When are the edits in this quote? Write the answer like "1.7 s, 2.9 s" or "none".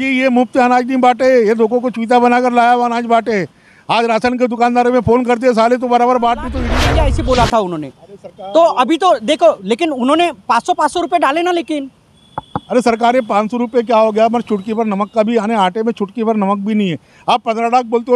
6.7 s